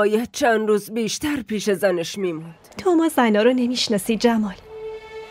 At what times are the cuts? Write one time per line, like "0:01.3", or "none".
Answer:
0:02.5